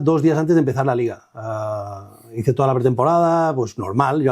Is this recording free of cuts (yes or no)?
yes